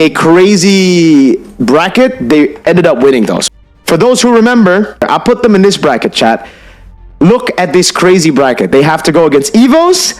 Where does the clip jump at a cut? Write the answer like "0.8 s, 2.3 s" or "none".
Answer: 3.4 s, 5.1 s